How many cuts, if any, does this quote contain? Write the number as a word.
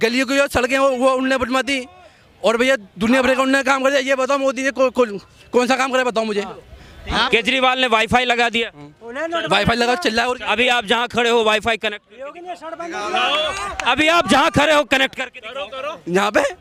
zero